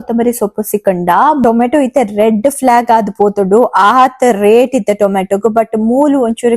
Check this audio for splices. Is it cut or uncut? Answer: cut